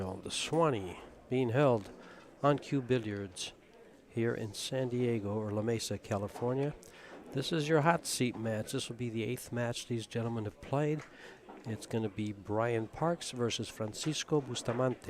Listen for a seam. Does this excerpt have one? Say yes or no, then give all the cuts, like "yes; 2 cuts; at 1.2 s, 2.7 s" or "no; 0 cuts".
yes; 1 cut; at 3.7 s